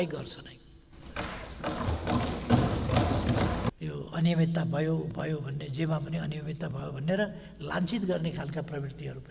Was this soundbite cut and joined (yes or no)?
yes